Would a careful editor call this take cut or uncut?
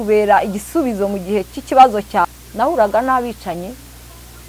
cut